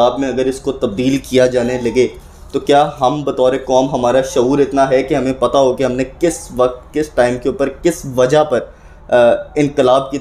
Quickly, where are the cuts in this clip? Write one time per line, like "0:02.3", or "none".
none